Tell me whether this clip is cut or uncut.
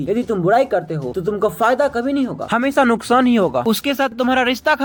uncut